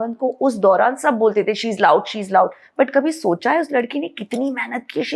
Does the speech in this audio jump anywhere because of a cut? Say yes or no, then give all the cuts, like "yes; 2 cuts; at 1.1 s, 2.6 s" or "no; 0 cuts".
no; 0 cuts